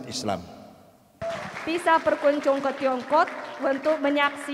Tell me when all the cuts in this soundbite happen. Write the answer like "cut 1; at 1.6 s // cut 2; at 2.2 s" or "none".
cut 1; at 1.2 s